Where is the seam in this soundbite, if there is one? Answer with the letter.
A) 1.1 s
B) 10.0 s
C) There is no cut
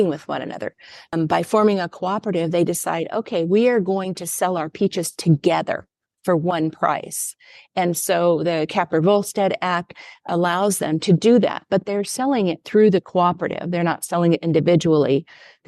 A